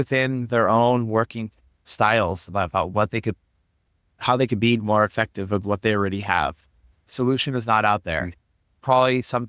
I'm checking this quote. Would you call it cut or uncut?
cut